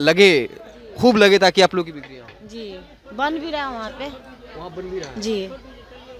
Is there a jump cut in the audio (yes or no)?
no